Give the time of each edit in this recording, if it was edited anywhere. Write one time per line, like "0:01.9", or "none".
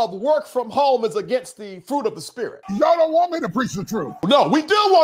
0:02.6
0:04.2